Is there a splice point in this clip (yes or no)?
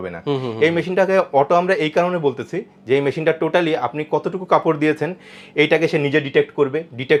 no